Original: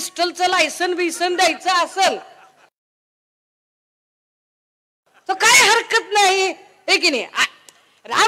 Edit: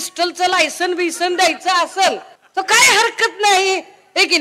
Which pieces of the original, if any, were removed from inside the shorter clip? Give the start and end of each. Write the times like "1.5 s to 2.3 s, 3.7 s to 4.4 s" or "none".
2.3 s to 5.1 s

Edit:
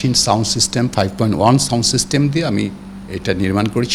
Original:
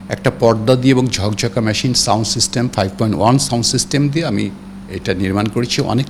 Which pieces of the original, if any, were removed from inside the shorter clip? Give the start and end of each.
none

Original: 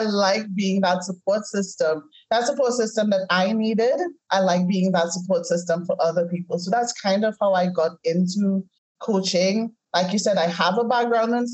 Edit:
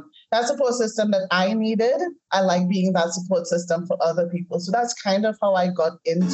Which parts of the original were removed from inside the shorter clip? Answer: none

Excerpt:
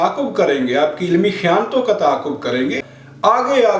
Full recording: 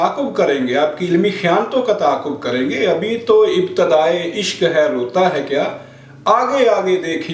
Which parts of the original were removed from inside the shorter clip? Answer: 2.8 s to 5.8 s

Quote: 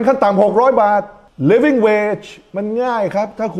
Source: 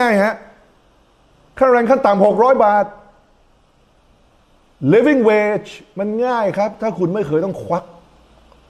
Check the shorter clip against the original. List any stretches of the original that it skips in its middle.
3.0 s to 4.6 s

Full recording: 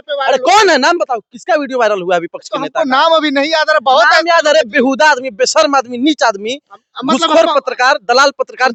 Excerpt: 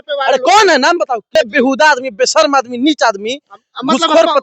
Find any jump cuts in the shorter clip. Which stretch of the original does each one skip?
1.3 s to 4.5 s

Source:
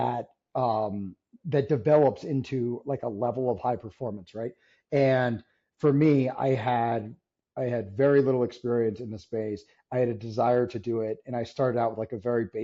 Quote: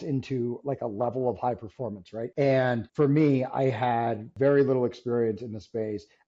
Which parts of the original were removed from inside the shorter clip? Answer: 4.4 s to 4.7 s, 5.4 s to 5.7 s, 7.1 s to 7.9 s

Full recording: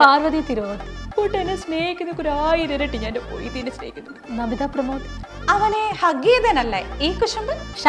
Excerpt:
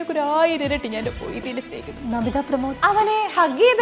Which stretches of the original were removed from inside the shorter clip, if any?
4.0 s to 4.2 s, 5.0 s to 5.4 s

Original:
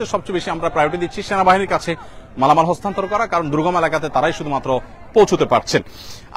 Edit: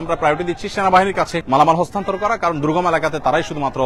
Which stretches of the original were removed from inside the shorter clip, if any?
1.9 s to 2.3 s

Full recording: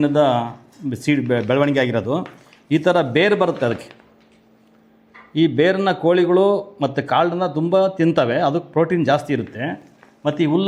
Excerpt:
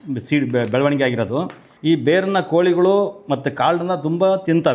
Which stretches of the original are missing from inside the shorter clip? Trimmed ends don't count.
2.4 s to 5.2 s

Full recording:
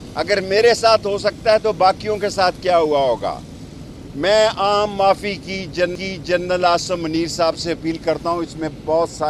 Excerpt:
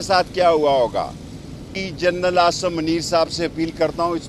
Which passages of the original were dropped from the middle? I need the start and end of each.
4.0 s to 6.0 s

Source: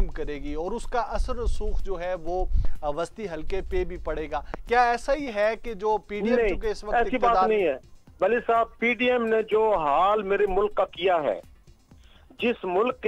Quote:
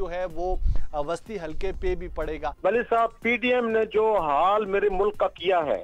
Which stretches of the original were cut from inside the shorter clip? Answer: 4.3 s to 8.0 s

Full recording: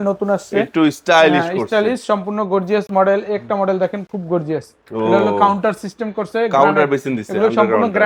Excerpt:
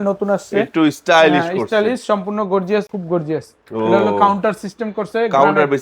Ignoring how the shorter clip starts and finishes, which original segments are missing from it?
2.9 s to 4.1 s

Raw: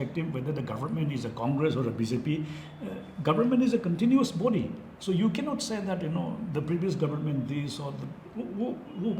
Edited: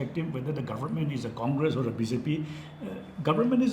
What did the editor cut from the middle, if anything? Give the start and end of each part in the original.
none

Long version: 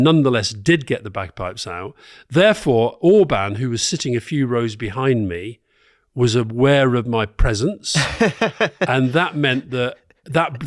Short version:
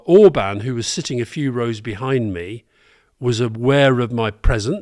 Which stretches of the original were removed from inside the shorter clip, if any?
none

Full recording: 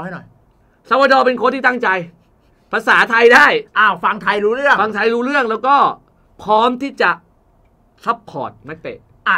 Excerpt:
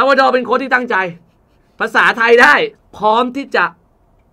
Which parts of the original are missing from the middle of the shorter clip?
3.7 s to 6.2 s

